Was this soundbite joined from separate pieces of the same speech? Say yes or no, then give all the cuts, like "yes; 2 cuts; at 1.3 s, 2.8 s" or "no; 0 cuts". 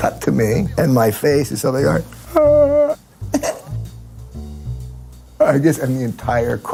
no; 0 cuts